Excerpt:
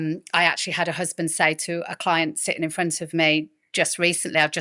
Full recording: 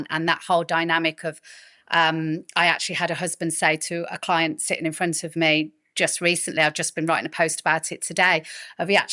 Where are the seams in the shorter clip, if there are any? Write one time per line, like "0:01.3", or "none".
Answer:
none

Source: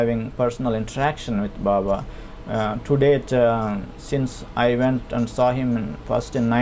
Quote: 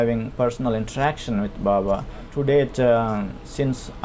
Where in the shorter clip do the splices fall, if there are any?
0:02.3

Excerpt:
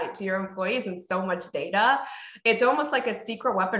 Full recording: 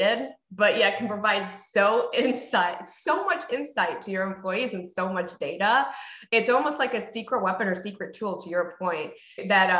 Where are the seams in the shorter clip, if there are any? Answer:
none

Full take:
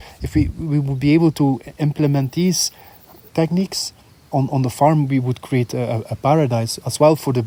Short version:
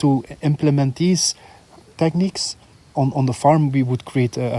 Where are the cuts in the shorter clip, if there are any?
none

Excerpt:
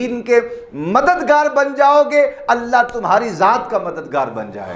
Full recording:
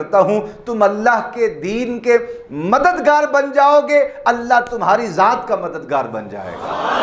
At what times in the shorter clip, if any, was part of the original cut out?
none

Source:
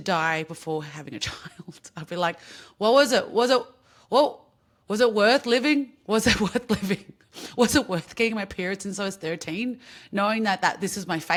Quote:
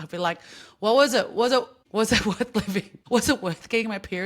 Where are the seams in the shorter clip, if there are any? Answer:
0:01.8
0:03.0

